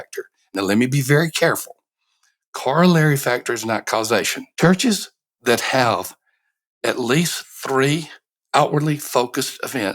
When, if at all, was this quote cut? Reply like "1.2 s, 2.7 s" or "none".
4.4 s